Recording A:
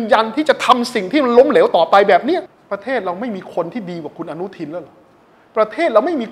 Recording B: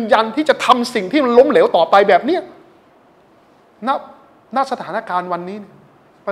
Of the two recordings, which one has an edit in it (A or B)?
A